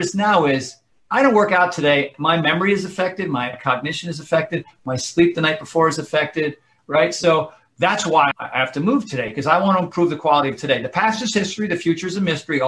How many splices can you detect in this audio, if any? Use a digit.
4